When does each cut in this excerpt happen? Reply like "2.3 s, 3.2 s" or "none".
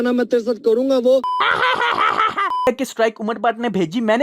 1.4 s, 2.7 s